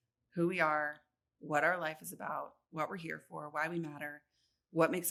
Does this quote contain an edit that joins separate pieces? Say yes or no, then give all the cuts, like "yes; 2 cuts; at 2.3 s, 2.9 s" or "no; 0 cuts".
no; 0 cuts